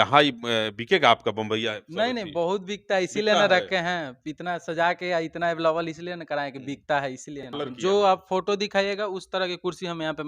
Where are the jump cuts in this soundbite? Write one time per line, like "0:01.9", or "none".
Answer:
0:07.5